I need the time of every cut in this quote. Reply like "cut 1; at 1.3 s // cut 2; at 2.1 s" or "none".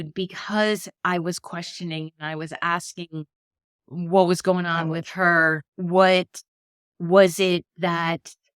cut 1; at 5.7 s